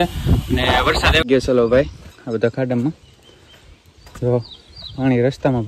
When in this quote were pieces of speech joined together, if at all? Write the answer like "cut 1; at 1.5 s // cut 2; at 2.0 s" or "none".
cut 1; at 1.2 s